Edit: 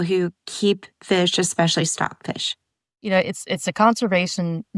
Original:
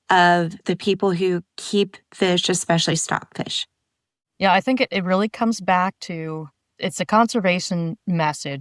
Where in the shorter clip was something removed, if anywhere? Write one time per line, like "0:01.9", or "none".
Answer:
0:03.1